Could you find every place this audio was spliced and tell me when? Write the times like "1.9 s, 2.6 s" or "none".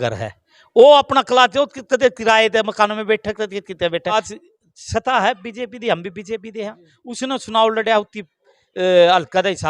4.1 s